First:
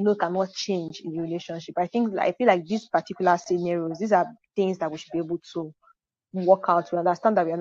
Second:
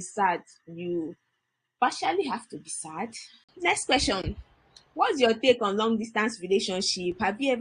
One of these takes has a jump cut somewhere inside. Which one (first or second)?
second